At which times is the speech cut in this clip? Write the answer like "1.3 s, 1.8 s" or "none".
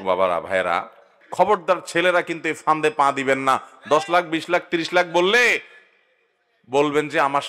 1.2 s